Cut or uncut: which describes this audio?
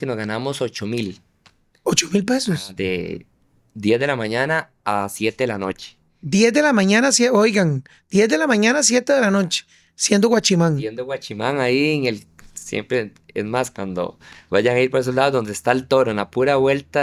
uncut